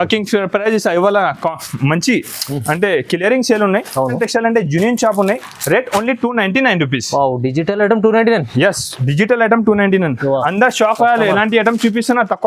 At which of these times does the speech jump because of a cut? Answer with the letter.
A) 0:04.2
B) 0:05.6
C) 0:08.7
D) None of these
A